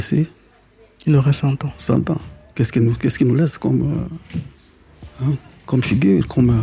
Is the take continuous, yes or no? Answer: yes